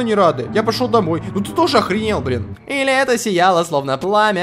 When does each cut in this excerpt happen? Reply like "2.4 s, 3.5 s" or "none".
2.6 s